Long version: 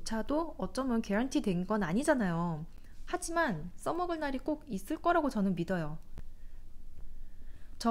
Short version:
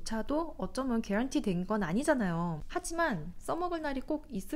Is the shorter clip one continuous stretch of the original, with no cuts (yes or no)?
no